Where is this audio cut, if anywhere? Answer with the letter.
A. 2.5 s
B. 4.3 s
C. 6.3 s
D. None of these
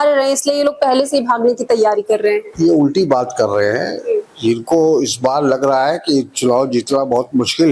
D